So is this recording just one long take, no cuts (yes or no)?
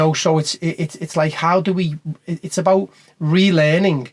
yes